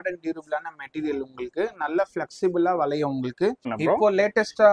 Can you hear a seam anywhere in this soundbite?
yes; 1 cut; at 3.7 s

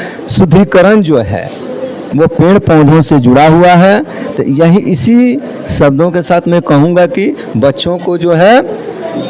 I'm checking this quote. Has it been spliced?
no; 0 cuts

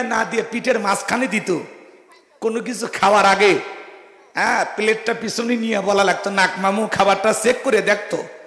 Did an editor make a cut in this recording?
no; 0 cuts

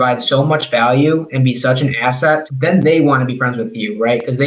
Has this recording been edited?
no; 0 cuts

